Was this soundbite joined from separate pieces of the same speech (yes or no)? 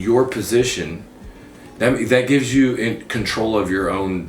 no